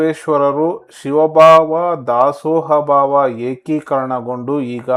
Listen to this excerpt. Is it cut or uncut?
uncut